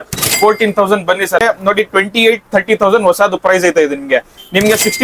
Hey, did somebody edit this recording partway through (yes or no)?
yes